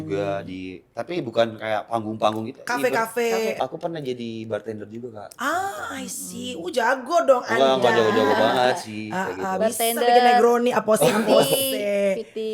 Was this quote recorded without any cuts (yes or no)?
no